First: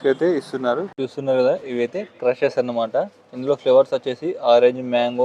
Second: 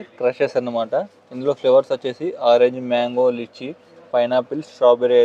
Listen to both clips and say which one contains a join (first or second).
first